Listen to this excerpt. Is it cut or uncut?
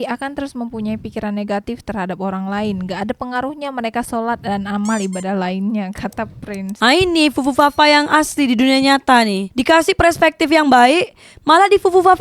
uncut